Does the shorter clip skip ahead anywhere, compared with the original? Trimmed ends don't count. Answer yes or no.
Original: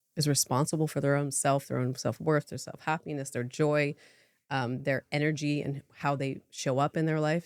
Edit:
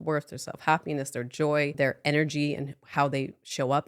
yes